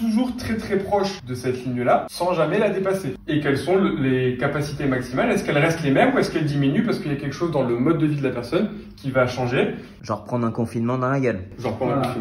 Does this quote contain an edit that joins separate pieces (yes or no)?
yes